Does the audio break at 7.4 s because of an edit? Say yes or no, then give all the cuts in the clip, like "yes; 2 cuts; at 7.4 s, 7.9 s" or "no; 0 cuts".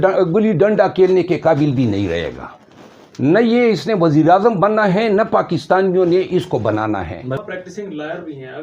yes; 1 cut; at 7.4 s